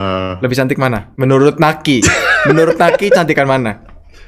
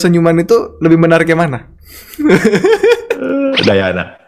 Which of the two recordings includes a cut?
second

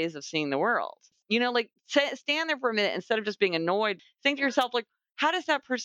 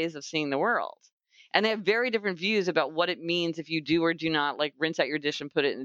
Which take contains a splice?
first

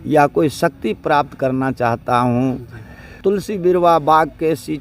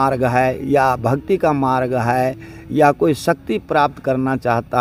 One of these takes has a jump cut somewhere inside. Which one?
first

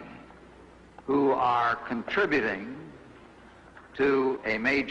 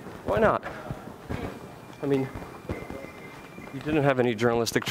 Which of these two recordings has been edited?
second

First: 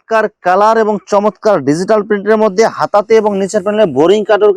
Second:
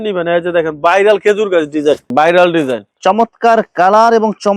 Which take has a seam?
second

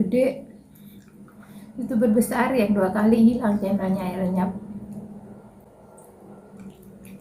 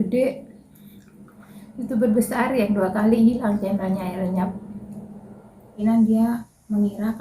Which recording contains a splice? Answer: second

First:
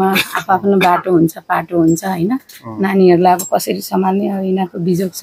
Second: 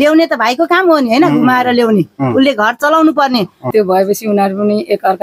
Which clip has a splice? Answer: second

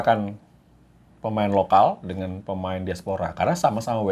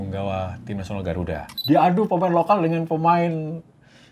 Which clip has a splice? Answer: second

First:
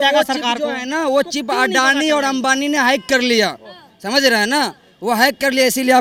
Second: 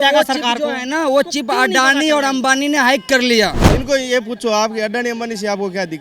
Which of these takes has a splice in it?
second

